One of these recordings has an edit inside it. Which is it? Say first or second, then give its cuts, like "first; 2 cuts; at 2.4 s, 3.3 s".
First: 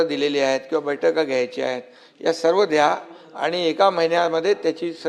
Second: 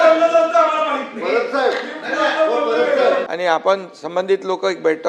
second; 1 cut; at 3.3 s